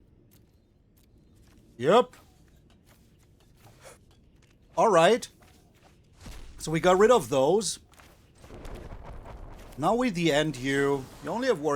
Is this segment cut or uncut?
cut